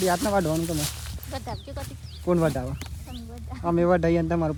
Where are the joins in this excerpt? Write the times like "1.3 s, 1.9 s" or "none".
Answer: none